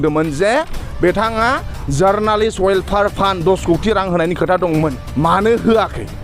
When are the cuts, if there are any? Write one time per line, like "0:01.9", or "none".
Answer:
0:05.0